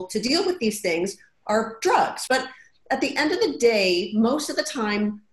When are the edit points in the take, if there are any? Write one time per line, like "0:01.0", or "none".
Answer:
0:02.2